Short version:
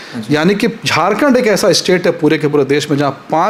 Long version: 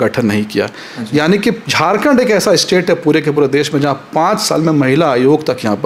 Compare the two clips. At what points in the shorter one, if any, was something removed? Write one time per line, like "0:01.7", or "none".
none